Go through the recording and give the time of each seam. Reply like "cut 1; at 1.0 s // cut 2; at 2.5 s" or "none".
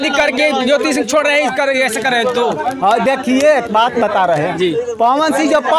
none